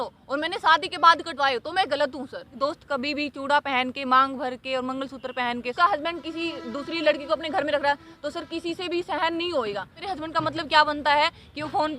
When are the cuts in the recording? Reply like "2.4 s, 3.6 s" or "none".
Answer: 2.5 s, 5.7 s, 10.0 s